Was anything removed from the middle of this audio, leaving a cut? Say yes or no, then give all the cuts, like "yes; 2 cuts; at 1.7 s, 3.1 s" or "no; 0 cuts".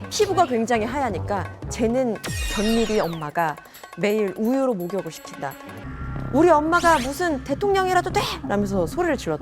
yes; 1 cut; at 5.8 s